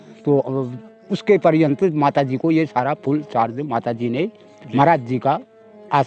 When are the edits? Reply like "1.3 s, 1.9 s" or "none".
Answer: none